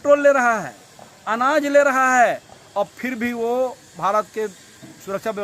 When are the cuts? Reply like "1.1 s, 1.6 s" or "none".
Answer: none

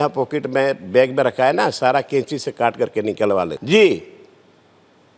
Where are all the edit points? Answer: none

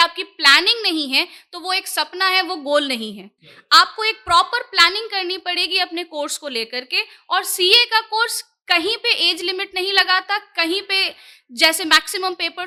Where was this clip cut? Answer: none

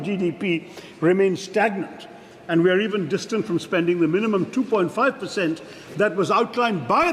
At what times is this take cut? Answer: none

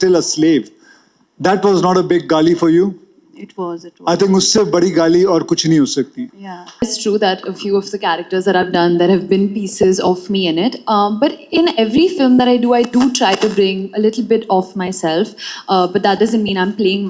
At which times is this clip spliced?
6.8 s

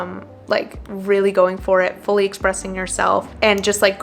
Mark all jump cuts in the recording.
none

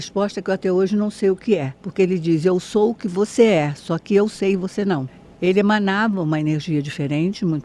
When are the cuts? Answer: 1.8 s, 5.3 s

